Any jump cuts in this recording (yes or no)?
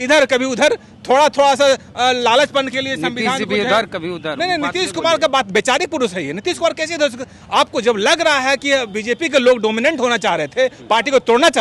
no